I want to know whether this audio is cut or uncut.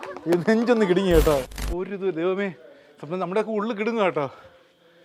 cut